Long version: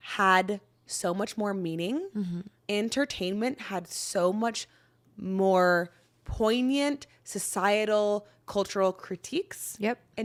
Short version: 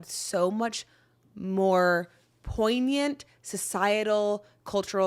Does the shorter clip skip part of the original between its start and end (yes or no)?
no